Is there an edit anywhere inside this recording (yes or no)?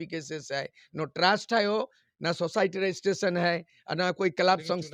no